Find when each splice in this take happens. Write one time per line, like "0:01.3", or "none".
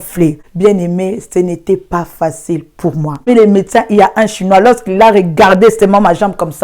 0:03.3